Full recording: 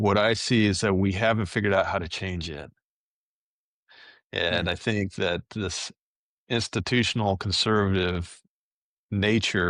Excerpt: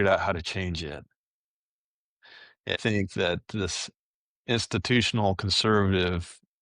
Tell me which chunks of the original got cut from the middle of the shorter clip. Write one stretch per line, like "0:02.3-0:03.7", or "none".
0:04.4-0:04.8